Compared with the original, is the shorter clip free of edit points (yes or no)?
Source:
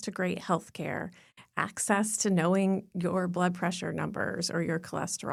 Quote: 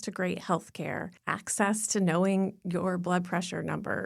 no